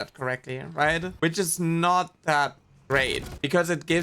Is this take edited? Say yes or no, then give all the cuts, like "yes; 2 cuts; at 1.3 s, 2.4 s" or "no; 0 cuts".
yes; 1 cut; at 1.1 s